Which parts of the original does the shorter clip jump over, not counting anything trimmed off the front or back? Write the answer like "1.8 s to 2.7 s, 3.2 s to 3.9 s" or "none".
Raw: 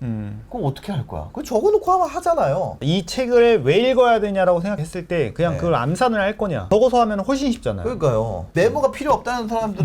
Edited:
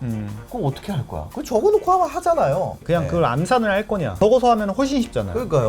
2.8 s to 5.3 s